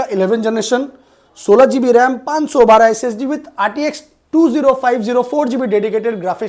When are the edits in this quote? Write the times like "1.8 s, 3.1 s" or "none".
none